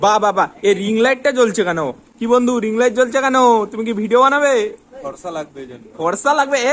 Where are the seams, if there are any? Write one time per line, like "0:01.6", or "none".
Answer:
0:02.1